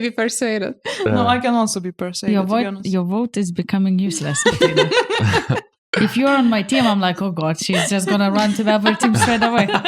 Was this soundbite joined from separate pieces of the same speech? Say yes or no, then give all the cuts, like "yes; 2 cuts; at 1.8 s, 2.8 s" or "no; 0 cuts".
no; 0 cuts